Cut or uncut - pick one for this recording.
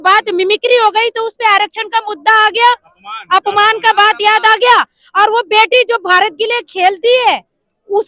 uncut